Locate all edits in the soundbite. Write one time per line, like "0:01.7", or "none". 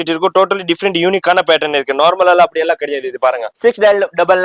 0:03.5